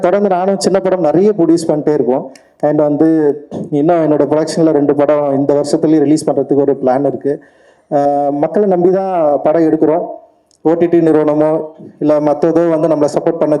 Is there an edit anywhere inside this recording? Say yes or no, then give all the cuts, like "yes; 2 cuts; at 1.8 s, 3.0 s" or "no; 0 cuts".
no; 0 cuts